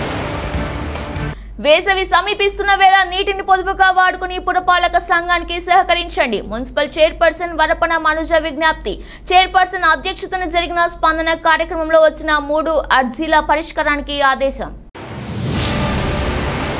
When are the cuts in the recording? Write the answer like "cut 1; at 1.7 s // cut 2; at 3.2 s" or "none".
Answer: cut 1; at 1.3 s